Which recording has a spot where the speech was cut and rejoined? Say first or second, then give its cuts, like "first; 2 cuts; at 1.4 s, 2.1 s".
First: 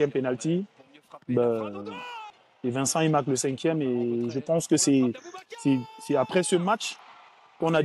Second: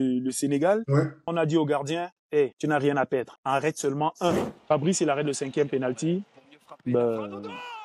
second; 4 cuts; at 1.3 s, 2.6 s, 3.3 s, 4.5 s